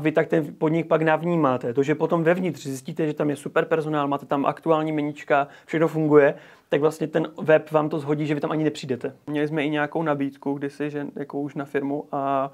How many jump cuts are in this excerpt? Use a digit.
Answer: 1